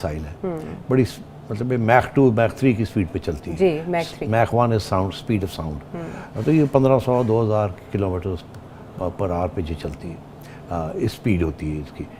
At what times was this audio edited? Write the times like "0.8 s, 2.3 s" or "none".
none